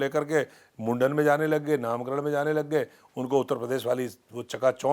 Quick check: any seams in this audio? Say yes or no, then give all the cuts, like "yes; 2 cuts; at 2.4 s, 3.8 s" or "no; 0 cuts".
no; 0 cuts